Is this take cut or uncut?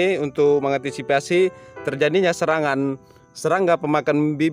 uncut